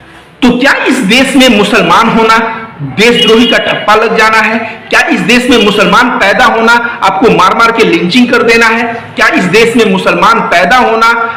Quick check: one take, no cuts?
yes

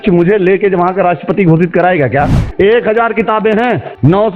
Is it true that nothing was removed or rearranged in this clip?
no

